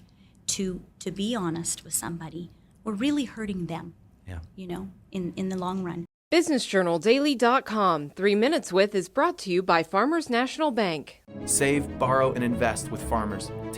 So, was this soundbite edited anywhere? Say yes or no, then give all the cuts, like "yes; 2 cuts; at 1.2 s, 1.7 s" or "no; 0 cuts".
yes; 1 cut; at 6.1 s